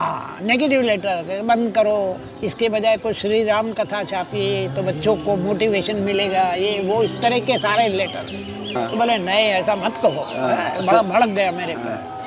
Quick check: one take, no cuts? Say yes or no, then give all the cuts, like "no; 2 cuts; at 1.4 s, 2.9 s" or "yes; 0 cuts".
no; 1 cut; at 8.8 s